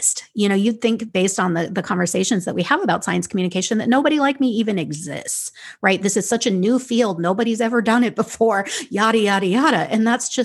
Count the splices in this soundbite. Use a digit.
0